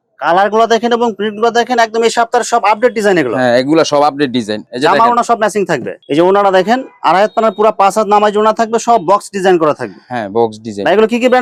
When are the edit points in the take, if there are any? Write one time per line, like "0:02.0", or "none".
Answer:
none